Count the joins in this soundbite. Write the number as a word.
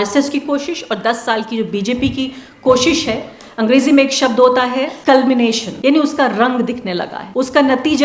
three